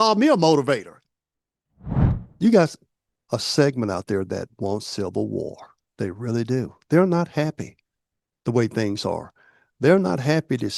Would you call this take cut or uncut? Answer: cut